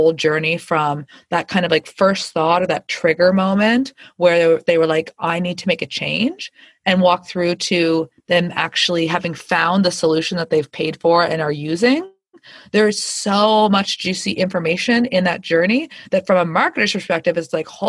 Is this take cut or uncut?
uncut